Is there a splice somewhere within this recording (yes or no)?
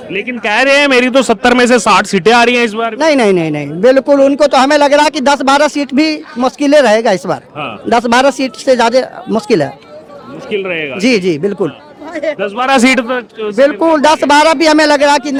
no